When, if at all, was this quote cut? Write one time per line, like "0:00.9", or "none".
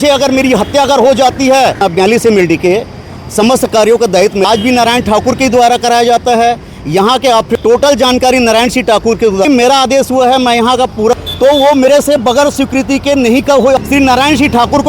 0:01.8
0:04.4
0:07.5
0:09.5
0:11.2
0:13.8